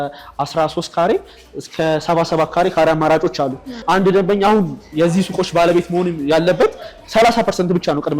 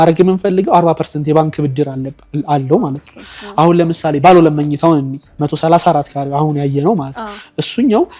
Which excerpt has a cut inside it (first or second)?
first